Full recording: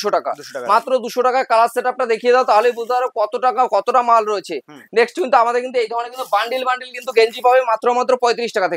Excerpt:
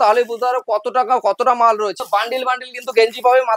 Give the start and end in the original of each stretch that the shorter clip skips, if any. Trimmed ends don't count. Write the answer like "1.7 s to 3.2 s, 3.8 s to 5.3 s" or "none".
4.5 s to 6.2 s